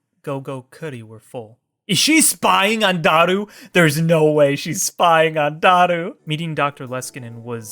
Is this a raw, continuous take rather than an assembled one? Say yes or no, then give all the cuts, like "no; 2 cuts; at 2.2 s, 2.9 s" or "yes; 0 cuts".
no; 1 cut; at 6.2 s